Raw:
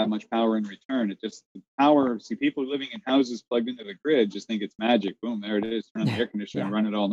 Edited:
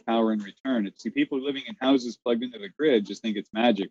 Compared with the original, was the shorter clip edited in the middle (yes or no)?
yes